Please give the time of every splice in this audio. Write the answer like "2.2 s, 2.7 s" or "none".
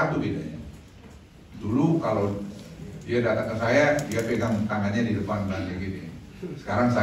none